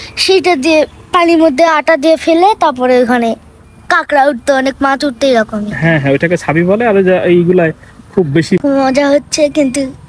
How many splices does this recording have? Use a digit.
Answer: 1